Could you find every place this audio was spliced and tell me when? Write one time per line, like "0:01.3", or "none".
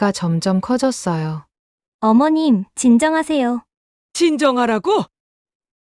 none